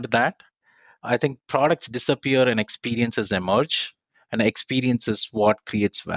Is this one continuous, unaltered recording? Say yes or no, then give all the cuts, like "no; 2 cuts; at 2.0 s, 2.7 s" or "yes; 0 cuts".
no; 1 cut; at 1.0 s